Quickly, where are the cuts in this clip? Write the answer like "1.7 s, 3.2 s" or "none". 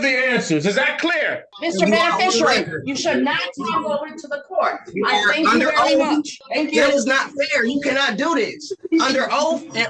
1.5 s, 6.4 s